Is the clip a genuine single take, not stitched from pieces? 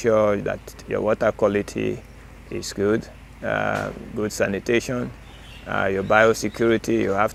yes; 0 cuts

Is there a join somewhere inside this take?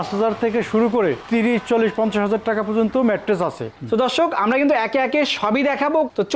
no; 0 cuts

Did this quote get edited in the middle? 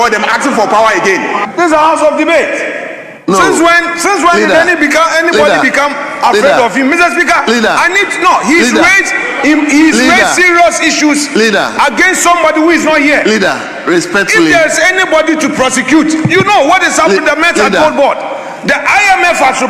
yes; 1 cut; at 1.4 s

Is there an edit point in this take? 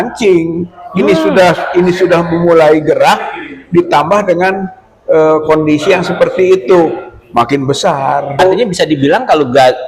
yes; 1 cut; at 8.4 s

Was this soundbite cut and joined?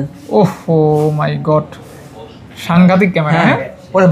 no; 0 cuts

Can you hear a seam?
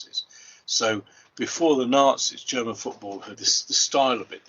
yes; 1 cut; at 3.4 s

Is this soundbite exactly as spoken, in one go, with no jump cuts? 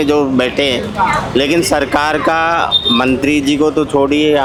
yes; 0 cuts

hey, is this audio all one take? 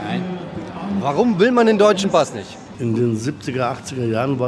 no; 1 cut; at 2.7 s

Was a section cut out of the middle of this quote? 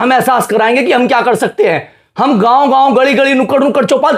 no; 0 cuts

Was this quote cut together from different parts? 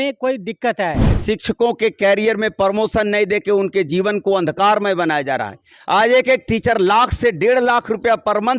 yes; 1 cut; at 1.1 s

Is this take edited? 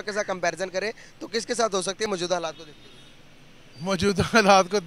no; 0 cuts

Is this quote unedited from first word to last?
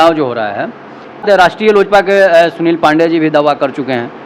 no; 1 cut; at 1.5 s

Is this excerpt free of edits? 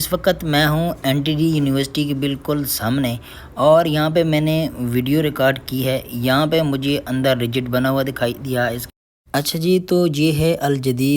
no; 1 cut; at 8.8 s

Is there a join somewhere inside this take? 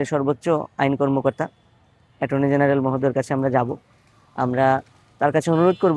no; 0 cuts

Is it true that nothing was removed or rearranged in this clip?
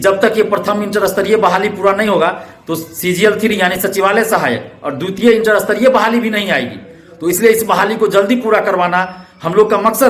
yes; 0 cuts

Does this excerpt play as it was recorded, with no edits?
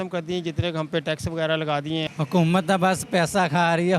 no; 1 cut; at 2.1 s

